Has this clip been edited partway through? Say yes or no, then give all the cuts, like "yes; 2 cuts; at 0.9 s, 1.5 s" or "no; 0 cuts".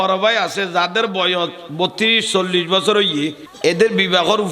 yes; 1 cut; at 3.5 s